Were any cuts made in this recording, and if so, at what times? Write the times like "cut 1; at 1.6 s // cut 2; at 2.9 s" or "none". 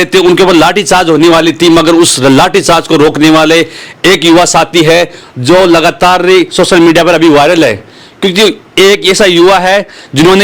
none